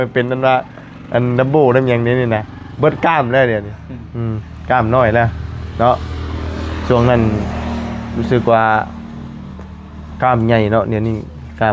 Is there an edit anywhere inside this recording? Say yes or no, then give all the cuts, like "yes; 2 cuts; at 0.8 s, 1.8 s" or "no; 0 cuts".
no; 0 cuts